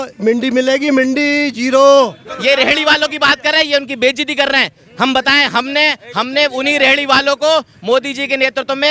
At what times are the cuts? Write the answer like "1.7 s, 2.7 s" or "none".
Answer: 2.3 s